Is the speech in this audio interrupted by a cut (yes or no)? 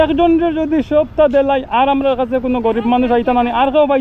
no